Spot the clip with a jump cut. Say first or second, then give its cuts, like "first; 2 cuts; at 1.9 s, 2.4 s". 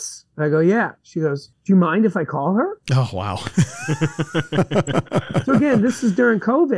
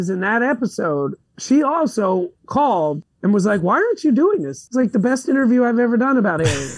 second; 2 cuts; at 2.3 s, 4.6 s